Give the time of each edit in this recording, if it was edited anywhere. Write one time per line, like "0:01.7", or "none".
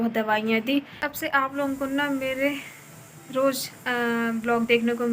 0:01.0